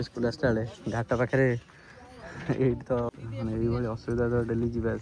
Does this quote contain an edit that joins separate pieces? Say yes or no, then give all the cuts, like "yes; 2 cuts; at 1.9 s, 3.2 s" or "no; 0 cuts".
yes; 1 cut; at 3.1 s